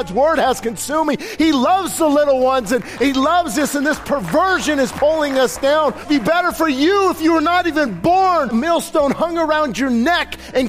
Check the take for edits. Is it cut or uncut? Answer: cut